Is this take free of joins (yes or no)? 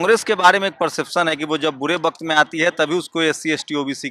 yes